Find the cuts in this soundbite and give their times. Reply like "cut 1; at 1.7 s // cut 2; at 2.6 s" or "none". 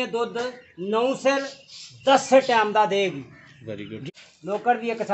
cut 1; at 4.0 s